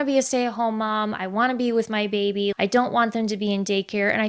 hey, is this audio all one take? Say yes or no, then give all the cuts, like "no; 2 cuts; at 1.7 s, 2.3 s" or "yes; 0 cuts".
no; 1 cut; at 2.5 s